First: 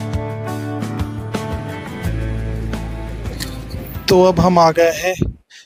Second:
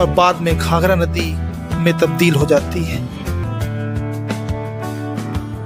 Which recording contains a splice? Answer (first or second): second